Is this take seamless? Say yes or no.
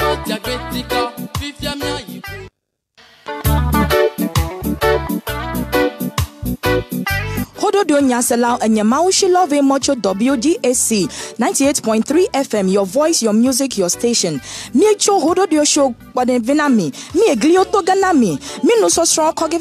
no